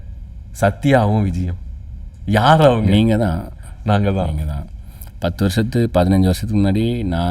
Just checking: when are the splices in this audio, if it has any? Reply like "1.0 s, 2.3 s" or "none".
none